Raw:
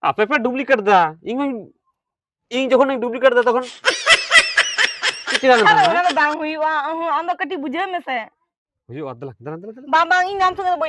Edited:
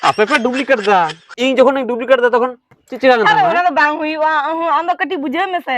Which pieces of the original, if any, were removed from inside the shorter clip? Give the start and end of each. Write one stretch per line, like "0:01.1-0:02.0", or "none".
0:01.2-0:02.3
0:03.8-0:05.1